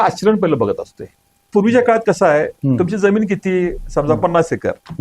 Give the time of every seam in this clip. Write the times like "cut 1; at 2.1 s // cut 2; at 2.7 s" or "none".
cut 1; at 1.5 s